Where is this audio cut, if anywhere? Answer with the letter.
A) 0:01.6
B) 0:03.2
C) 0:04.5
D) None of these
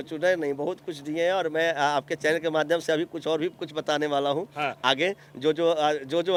D